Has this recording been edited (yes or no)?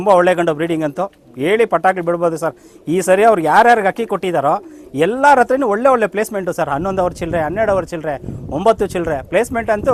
no